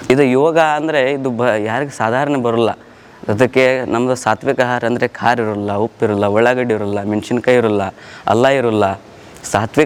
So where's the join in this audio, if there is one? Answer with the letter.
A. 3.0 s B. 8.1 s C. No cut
C